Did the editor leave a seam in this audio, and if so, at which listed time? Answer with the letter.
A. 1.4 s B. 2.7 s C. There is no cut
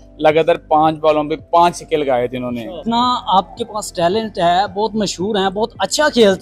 B